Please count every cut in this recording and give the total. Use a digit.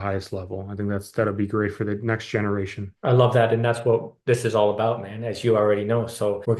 0